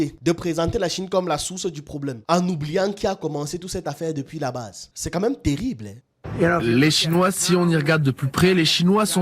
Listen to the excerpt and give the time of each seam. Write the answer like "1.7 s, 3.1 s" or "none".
5.9 s